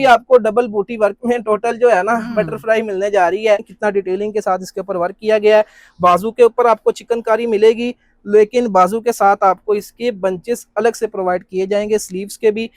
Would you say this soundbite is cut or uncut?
cut